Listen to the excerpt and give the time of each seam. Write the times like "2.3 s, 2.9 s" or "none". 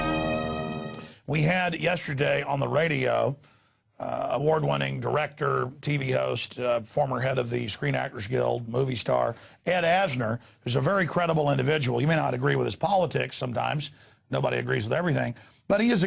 none